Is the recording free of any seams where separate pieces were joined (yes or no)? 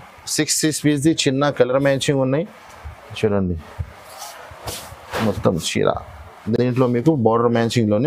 yes